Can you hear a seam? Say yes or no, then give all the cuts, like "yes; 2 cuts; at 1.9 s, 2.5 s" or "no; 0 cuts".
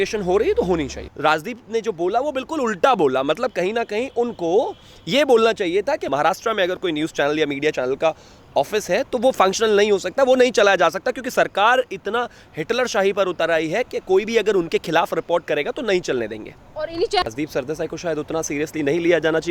yes; 2 cuts; at 1.0 s, 17.2 s